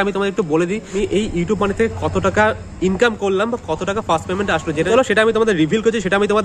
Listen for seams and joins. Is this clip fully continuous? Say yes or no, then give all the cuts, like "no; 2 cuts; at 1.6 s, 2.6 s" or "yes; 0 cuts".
no; 2 cuts; at 0.9 s, 4.9 s